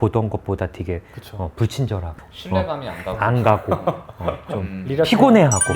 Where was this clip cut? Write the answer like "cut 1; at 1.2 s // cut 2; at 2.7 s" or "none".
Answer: cut 1; at 2.1 s

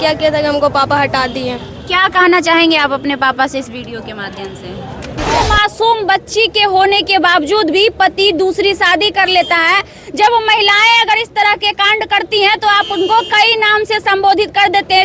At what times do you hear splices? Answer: cut 1; at 5.4 s

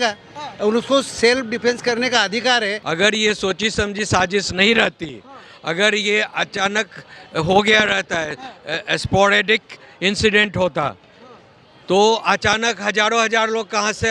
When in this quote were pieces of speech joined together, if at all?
cut 1; at 2.8 s

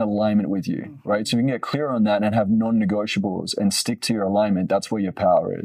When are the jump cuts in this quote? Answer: none

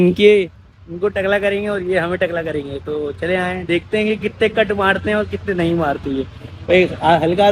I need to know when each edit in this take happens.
none

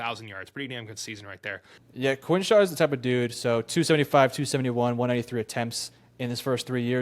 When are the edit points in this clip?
cut 1; at 1.8 s

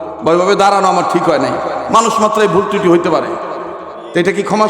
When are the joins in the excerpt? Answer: none

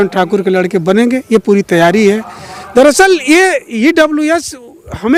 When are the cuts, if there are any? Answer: none

